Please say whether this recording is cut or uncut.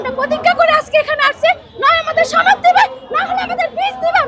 uncut